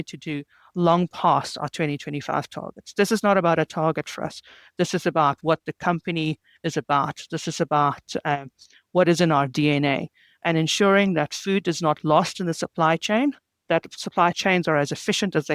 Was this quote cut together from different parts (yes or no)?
yes